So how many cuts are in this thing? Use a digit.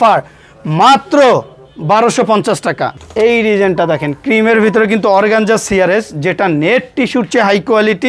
1